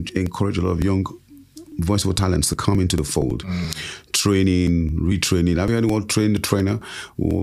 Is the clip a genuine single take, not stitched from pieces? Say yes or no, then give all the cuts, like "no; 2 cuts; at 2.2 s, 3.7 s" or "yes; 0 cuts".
yes; 0 cuts